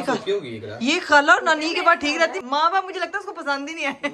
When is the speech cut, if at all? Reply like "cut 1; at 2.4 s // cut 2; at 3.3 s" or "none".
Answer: none